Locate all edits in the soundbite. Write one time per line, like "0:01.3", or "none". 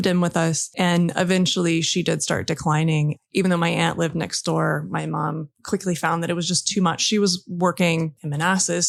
none